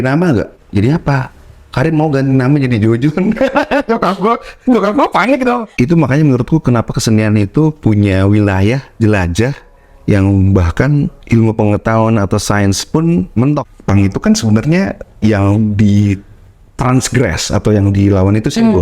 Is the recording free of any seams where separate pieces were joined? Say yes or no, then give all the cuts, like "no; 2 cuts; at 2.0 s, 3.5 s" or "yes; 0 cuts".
no; 2 cuts; at 5.7 s, 13.7 s